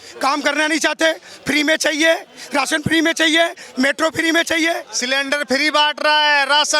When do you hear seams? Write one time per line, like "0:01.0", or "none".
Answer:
0:04.9